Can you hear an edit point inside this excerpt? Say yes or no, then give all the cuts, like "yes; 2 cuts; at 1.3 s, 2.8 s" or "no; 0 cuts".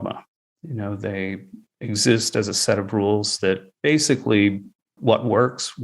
yes; 3 cuts; at 1.6 s, 3.7 s, 4.9 s